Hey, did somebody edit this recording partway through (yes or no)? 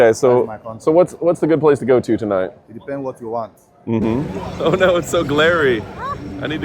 yes